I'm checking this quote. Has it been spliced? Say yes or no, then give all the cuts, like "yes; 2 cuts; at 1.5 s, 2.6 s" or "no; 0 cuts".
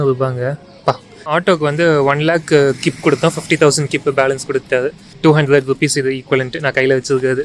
yes; 2 cuts; at 1.1 s, 5.1 s